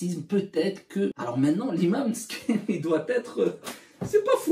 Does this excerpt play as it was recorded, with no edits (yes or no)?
no